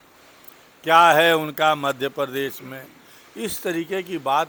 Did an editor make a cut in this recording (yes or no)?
no